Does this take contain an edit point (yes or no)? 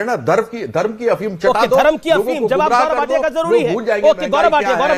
no